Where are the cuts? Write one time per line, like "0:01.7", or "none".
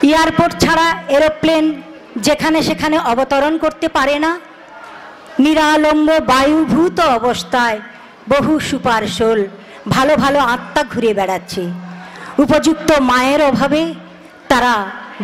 none